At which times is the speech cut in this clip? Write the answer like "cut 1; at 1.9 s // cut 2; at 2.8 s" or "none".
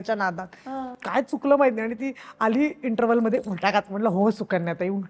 none